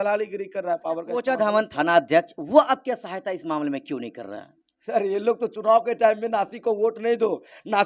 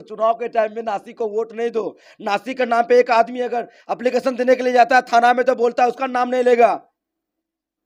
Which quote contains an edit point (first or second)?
first